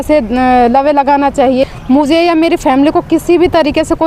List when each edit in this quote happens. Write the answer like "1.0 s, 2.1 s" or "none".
1.7 s